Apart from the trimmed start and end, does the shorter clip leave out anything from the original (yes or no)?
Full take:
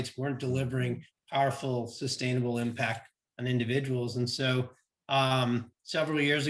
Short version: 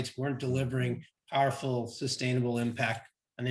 no